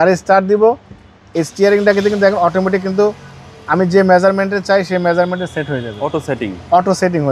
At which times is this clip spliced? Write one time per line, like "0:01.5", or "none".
none